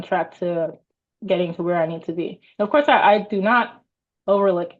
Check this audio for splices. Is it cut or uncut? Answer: uncut